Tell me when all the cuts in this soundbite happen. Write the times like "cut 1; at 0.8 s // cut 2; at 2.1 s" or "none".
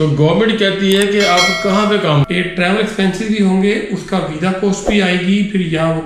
cut 1; at 2.2 s